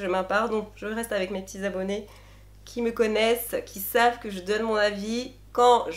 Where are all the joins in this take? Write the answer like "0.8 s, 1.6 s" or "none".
none